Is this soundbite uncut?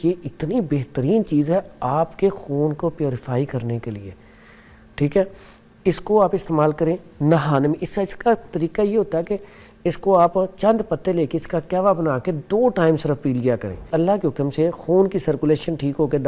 no; 1 cut; at 13.9 s

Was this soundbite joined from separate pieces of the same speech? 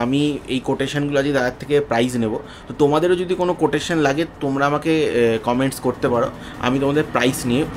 no; 0 cuts

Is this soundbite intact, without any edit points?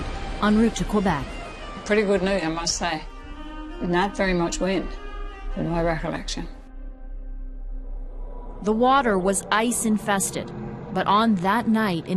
no; 1 cut; at 1.0 s

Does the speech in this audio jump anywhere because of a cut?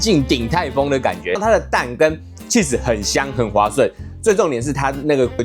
yes; 1 cut; at 1.4 s

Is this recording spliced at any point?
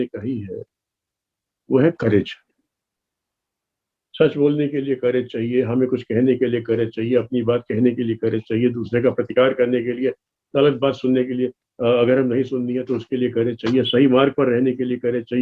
yes; 1 cut; at 4.0 s

